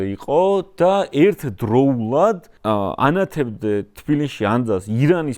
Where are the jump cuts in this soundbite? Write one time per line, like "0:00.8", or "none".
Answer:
0:02.5